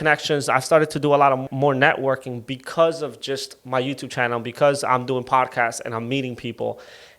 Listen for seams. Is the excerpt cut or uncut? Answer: cut